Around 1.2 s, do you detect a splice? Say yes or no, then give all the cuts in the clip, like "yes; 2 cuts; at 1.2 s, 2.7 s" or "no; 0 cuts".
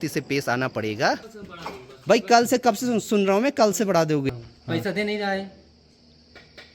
yes; 2 cuts; at 1.2 s, 4.3 s